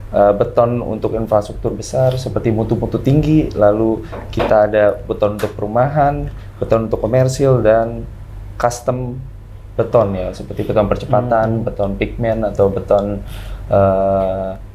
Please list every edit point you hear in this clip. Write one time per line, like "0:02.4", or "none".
none